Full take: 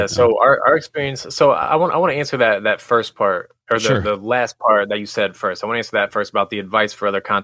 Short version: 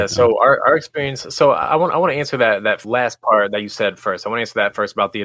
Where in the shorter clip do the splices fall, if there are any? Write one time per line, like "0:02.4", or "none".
0:02.8